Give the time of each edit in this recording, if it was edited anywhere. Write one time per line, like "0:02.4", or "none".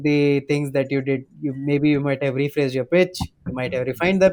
none